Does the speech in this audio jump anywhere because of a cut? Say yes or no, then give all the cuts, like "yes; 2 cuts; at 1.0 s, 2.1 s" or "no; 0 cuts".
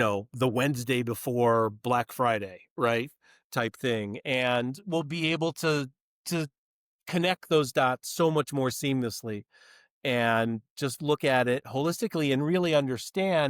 no; 0 cuts